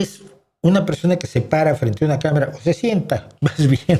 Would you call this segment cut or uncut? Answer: uncut